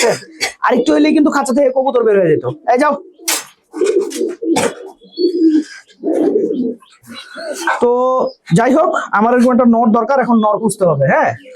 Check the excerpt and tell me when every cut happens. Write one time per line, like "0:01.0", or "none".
none